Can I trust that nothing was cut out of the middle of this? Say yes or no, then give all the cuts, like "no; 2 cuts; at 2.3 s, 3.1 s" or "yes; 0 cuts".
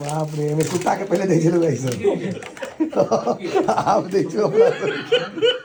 yes; 0 cuts